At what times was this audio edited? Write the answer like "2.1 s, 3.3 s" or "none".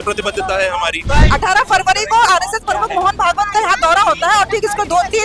1.1 s